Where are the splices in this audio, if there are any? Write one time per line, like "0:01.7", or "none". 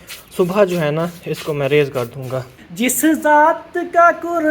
0:02.6